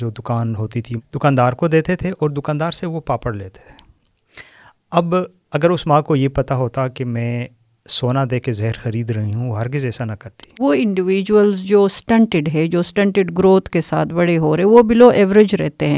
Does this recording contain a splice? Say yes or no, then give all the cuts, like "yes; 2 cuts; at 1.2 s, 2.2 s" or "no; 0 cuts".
yes; 2 cuts; at 0.9 s, 10.6 s